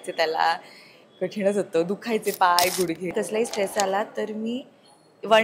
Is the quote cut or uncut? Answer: cut